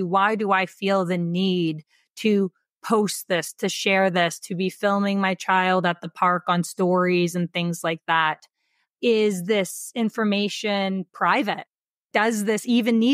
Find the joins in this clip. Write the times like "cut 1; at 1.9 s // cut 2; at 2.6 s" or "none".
cut 1; at 12.1 s